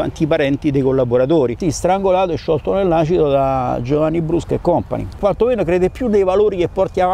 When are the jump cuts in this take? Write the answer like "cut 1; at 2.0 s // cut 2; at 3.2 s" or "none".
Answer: cut 1; at 1.6 s // cut 2; at 5.2 s